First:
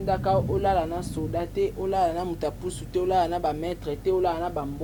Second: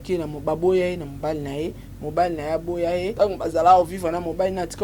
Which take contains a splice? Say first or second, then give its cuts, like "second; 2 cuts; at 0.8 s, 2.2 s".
second; 1 cut; at 3.1 s